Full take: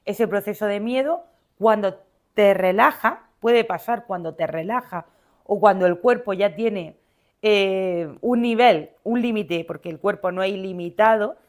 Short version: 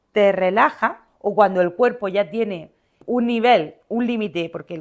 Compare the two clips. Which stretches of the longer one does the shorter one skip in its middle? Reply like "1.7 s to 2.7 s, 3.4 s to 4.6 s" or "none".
3.3 s to 5.3 s, 7.2 s to 8.1 s